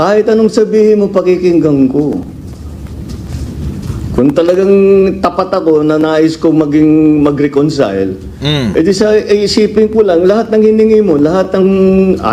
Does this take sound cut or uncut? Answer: uncut